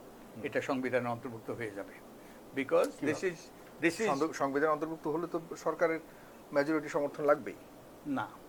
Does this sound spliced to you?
no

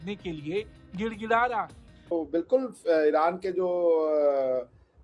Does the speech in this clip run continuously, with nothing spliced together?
no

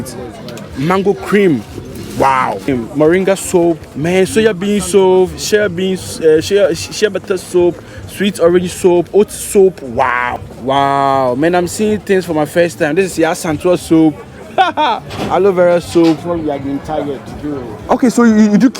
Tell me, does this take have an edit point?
yes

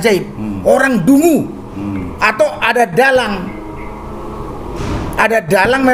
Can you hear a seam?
no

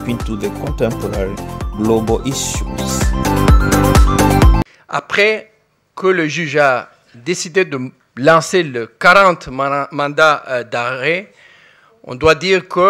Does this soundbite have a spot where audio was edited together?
yes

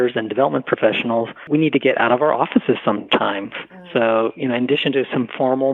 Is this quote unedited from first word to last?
no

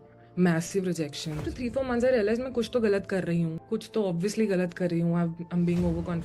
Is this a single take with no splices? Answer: no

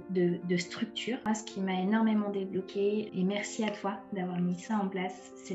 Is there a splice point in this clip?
yes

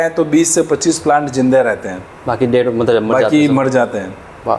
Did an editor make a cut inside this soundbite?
no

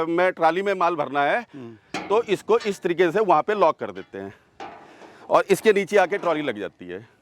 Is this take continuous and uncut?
yes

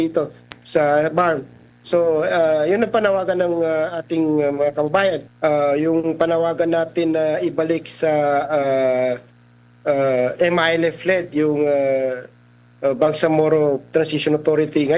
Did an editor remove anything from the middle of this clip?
yes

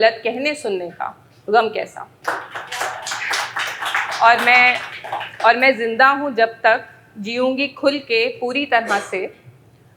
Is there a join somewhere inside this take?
no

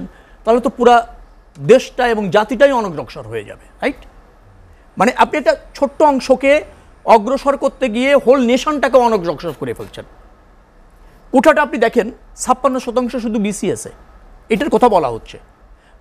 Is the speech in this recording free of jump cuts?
yes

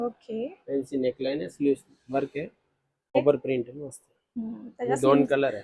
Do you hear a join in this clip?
yes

